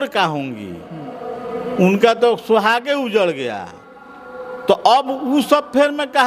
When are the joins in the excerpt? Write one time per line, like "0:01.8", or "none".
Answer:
none